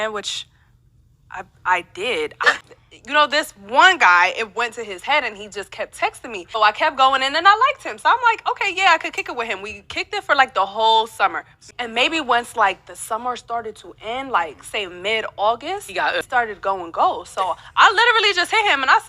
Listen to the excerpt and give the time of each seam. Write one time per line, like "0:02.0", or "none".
0:02.6
0:06.5
0:11.7
0:16.3